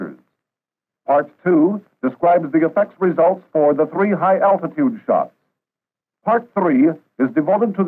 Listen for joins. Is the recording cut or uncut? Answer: uncut